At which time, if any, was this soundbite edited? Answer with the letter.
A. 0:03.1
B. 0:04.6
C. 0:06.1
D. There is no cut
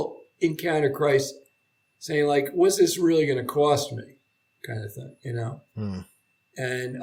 D